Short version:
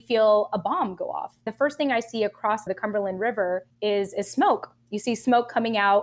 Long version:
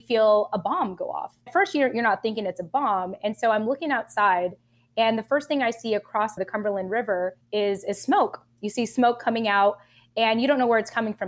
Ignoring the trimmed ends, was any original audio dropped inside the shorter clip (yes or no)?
yes